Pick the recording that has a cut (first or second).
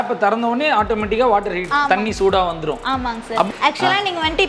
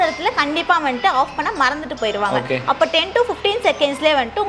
first